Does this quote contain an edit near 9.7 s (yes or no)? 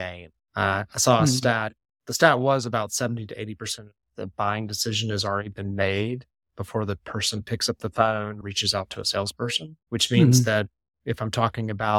yes